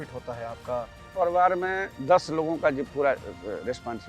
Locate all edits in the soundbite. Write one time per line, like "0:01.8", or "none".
0:01.1